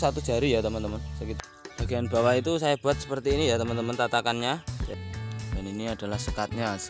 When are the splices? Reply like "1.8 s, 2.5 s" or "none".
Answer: 1.2 s, 4.9 s